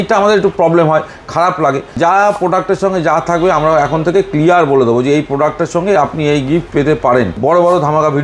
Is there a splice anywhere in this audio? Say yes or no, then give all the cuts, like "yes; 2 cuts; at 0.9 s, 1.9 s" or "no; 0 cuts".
yes; 2 cuts; at 1.9 s, 7.4 s